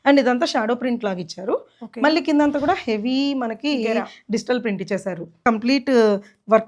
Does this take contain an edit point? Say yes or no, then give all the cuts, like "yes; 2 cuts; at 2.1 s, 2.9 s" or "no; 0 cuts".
yes; 1 cut; at 5.4 s